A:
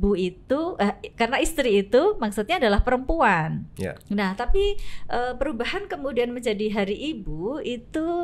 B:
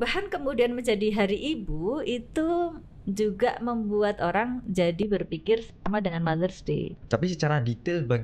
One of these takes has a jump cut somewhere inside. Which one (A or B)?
B